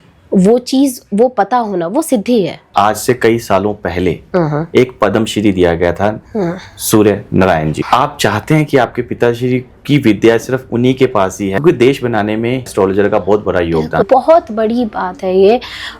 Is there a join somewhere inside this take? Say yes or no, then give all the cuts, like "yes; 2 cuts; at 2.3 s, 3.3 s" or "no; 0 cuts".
yes; 5 cuts; at 2.6 s, 7.8 s, 11.6 s, 12.7 s, 14.0 s